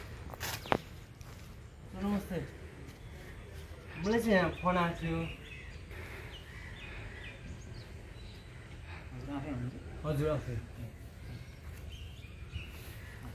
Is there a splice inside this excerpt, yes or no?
yes